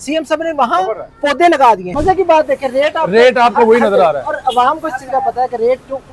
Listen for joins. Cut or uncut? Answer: cut